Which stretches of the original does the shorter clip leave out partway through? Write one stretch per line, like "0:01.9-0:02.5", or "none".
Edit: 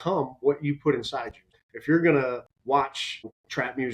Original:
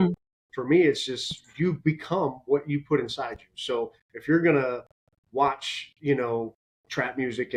0:03.6-0:03.9
0:05.4-0:06.4